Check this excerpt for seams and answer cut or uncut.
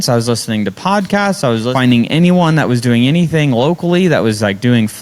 cut